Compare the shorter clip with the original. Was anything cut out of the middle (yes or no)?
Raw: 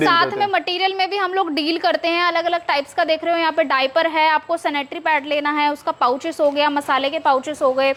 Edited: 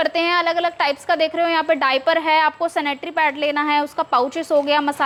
no